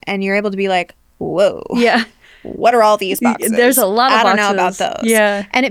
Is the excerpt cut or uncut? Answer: uncut